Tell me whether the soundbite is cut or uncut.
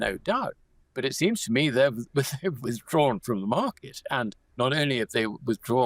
cut